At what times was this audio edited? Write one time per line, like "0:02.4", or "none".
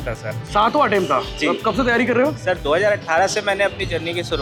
none

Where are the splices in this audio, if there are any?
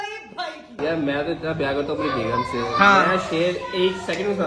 none

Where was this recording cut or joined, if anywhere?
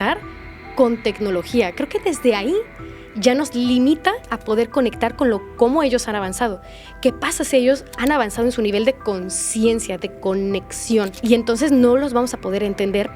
0:11.1

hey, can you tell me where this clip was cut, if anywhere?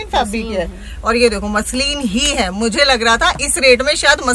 none

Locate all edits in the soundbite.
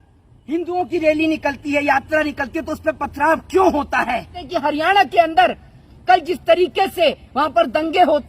0:04.4

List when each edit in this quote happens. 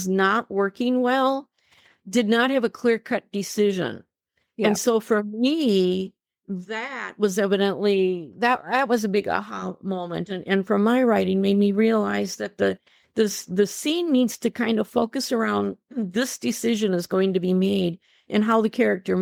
none

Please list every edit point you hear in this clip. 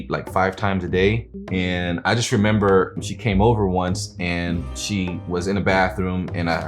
0:01.3
0:03.0
0:04.8

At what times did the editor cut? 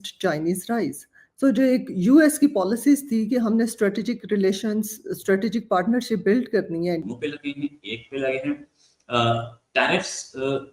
0:07.0

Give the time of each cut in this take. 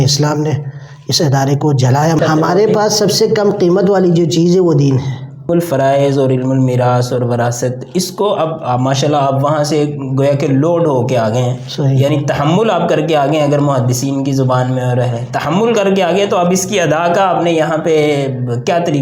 0:02.2
0:05.5

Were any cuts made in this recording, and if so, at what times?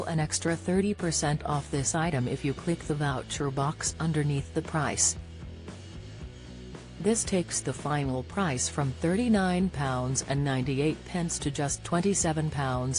none

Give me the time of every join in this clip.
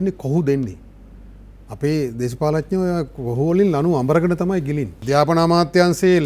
0:04.9

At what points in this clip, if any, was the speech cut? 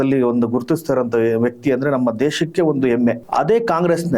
0:03.2

